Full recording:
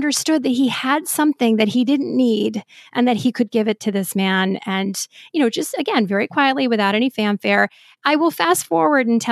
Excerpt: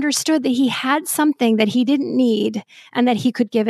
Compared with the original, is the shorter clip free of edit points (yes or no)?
yes